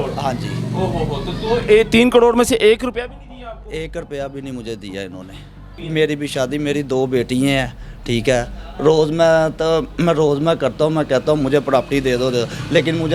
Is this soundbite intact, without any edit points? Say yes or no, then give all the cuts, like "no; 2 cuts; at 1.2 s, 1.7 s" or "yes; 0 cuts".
no; 1 cut; at 5.8 s